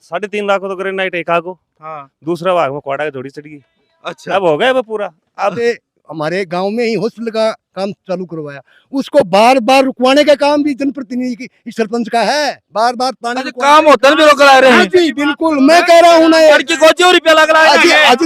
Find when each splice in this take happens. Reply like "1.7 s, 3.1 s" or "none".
5.6 s